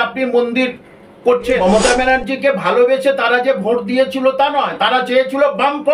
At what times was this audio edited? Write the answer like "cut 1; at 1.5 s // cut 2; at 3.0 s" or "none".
cut 1; at 1.5 s